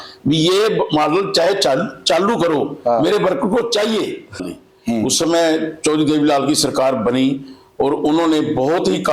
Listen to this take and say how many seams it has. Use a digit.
1